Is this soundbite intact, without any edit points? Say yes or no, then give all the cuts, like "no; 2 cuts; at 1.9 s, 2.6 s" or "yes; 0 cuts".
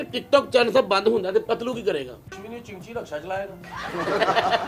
yes; 0 cuts